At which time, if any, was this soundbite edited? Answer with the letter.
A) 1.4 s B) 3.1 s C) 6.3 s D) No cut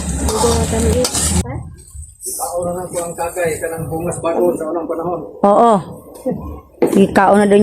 A